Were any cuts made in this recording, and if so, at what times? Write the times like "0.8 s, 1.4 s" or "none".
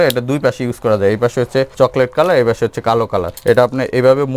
1.7 s, 3.3 s